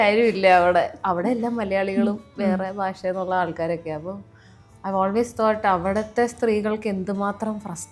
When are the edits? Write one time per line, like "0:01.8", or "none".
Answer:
none